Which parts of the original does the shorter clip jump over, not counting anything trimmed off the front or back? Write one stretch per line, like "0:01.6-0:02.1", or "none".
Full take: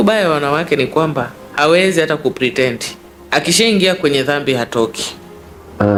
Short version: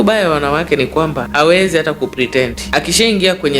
0:01.2-0:01.5
0:02.8-0:03.2

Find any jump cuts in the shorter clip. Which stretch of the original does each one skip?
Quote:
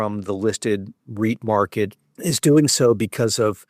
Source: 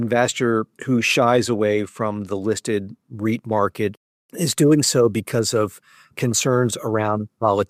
0:04.1-0:04.2

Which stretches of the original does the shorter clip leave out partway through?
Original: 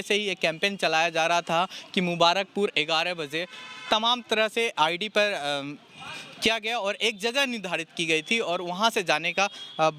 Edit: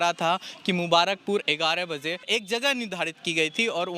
0:03.5-0:07.0

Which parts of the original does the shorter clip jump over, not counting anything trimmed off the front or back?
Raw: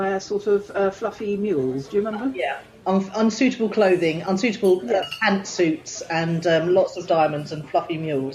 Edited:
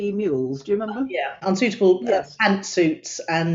0:02.6-0:04.2

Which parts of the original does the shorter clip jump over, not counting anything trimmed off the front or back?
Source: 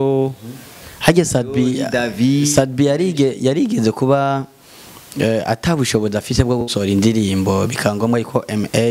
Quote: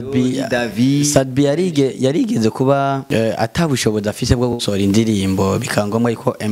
0:04.4-0:05.1

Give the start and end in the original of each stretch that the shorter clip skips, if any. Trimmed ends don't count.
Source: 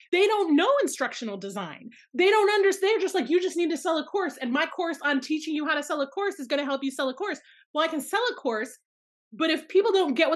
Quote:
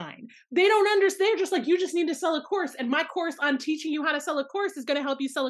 none

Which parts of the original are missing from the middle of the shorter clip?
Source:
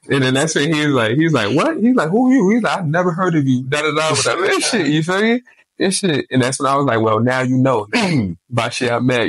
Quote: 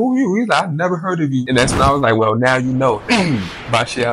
0:03.6-0:06.3

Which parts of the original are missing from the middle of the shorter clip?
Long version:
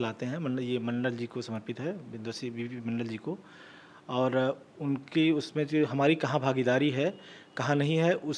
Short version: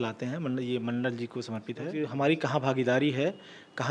0:02.0-0:05.8

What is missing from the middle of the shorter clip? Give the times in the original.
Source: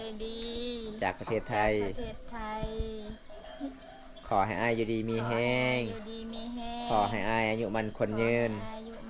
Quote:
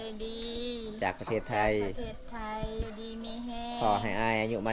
0:02.8-0:05.9

